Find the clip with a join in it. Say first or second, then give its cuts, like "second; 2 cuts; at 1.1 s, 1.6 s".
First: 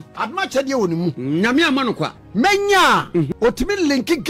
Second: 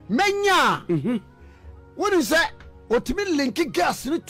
first; 2 cuts; at 2.2 s, 3.3 s